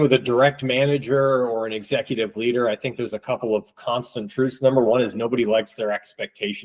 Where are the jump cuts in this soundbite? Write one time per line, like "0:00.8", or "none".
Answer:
none